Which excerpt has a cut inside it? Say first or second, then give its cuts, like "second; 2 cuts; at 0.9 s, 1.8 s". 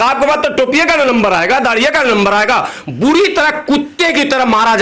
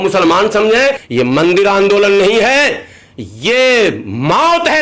second; 1 cut; at 1.0 s